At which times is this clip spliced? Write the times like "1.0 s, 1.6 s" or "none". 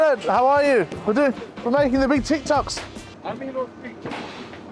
none